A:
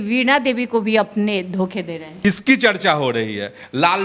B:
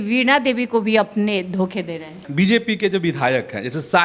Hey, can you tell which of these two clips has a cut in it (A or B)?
A